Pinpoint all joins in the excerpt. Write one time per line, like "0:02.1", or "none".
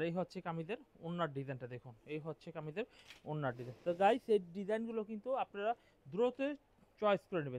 none